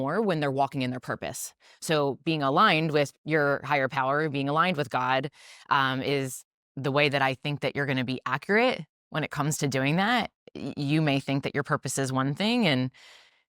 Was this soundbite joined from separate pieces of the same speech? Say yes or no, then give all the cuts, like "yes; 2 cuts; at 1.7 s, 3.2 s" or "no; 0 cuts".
no; 0 cuts